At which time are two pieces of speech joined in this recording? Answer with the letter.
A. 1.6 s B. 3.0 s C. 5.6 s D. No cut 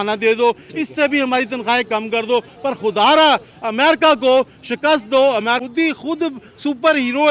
C